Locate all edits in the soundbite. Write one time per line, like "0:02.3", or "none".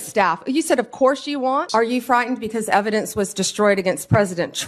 0:01.6